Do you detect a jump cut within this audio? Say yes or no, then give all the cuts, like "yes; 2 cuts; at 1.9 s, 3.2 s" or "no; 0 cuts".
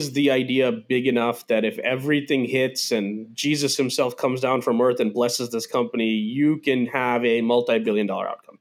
no; 0 cuts